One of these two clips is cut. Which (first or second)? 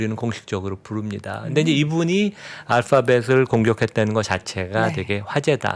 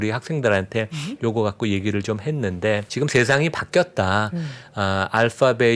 second